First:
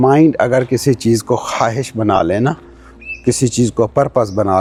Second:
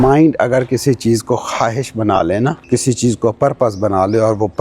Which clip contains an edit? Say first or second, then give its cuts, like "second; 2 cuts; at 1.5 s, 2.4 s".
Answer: second; 1 cut; at 2.6 s